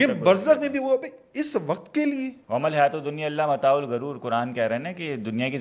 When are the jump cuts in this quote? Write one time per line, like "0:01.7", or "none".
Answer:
0:02.4